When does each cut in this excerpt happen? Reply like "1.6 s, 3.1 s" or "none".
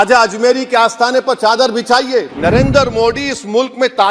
2.3 s